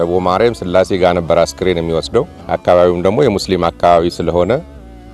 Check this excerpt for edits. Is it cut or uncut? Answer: cut